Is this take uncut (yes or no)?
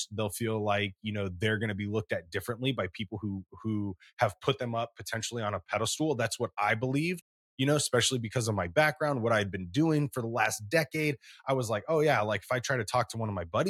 yes